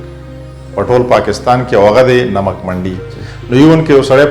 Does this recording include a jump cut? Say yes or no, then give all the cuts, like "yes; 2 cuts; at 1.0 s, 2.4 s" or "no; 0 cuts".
no; 0 cuts